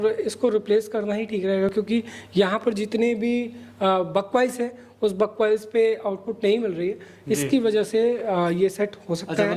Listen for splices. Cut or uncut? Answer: uncut